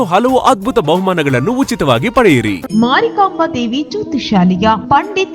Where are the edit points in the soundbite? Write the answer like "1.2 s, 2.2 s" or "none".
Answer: 2.6 s